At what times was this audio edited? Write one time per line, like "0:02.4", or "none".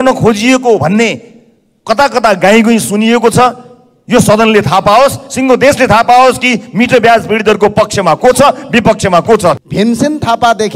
0:09.6